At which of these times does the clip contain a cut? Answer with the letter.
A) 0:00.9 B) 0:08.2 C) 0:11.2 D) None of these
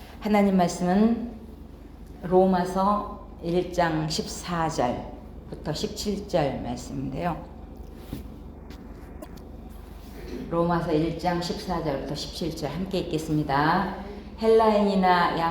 A